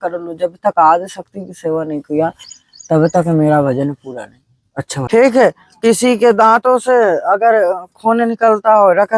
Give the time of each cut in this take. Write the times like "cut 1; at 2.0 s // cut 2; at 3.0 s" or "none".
cut 1; at 5.1 s